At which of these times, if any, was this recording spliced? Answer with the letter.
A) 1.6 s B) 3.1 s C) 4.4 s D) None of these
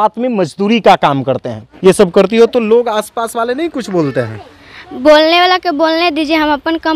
A